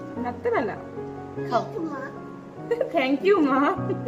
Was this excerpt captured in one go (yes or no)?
yes